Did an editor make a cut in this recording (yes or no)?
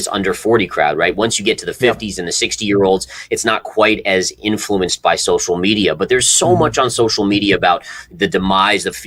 no